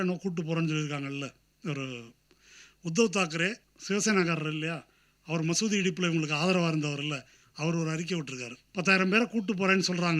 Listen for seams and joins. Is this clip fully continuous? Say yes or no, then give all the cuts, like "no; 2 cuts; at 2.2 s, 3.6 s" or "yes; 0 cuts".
no; 2 cuts; at 3.7 s, 8.5 s